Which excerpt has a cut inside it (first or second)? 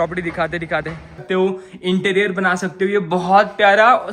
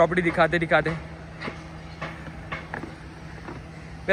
first